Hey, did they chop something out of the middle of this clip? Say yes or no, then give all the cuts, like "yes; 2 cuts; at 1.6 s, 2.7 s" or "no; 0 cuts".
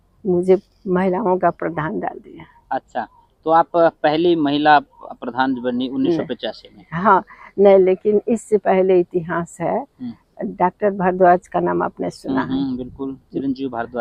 no; 0 cuts